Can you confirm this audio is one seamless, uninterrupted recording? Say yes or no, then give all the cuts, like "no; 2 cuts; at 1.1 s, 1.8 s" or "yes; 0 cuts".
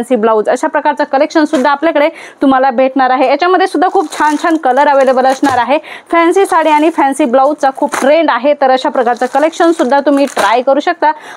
yes; 0 cuts